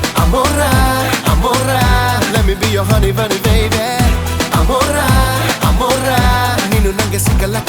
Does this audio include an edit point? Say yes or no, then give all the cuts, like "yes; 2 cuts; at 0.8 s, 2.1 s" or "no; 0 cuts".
no; 0 cuts